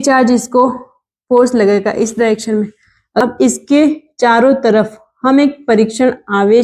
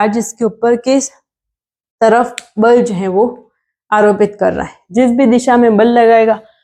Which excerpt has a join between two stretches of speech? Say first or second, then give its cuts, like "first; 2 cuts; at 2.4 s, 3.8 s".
first; 1 cut; at 3.2 s